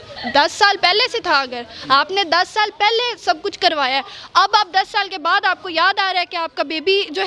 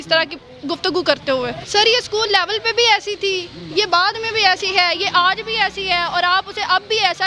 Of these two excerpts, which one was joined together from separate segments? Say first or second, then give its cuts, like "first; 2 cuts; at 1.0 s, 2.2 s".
second; 1 cut; at 1.6 s